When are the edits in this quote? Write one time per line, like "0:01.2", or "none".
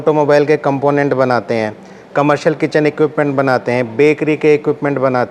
none